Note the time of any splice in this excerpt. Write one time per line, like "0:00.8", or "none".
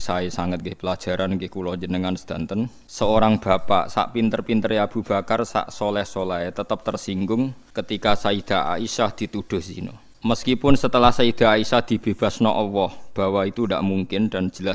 0:02.8
0:07.6
0:10.0

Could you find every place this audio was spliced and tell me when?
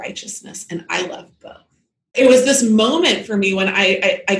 0:02.1

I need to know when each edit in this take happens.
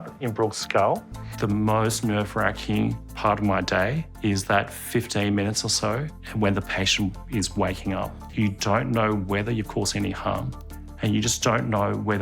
0:01.2
0:08.2

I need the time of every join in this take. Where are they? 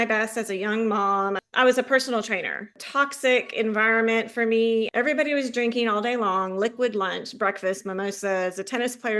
0:01.4
0:02.7
0:04.9

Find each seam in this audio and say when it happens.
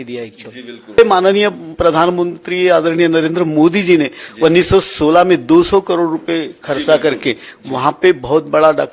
0:01.0

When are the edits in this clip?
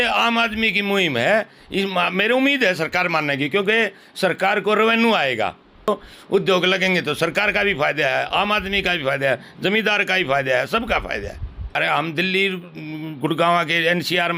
0:05.9
0:11.8

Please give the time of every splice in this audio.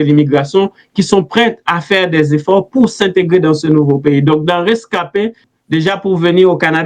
0:05.5

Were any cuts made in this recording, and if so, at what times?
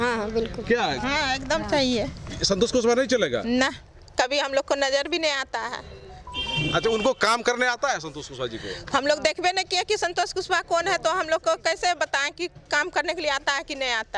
none

